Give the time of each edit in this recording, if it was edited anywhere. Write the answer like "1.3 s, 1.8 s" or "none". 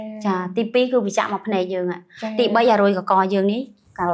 none